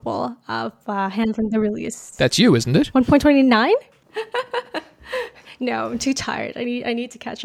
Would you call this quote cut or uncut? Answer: uncut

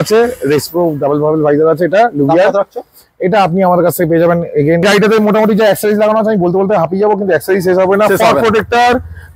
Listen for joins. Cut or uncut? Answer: cut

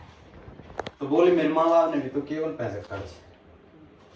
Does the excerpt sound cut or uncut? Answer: uncut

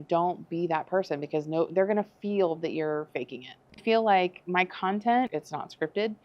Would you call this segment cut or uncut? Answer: cut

